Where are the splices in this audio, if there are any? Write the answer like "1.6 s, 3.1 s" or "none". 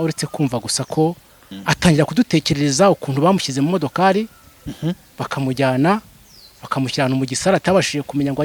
1.5 s